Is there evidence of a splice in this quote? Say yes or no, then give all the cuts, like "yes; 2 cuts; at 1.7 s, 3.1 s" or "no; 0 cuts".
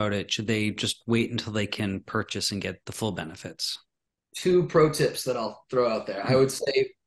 yes; 1 cut; at 2.8 s